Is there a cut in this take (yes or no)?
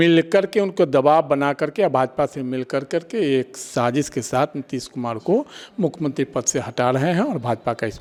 no